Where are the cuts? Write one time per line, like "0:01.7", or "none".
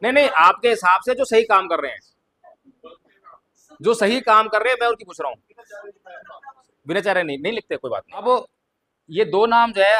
0:08.2